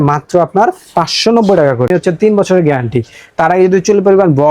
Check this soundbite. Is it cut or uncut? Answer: cut